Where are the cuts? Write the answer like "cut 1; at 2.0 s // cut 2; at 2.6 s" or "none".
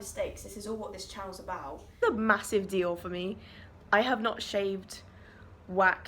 cut 1; at 2.0 s